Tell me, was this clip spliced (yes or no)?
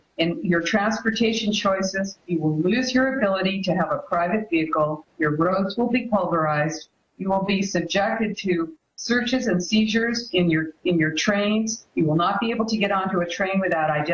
yes